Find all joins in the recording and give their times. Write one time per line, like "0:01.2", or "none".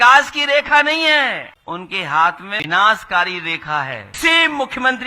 0:01.5
0:02.5
0:04.2